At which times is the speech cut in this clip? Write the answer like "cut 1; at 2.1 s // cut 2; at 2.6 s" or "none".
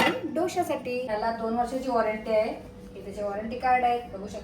cut 1; at 1.1 s